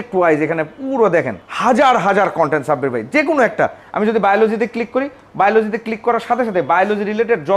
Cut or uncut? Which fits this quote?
uncut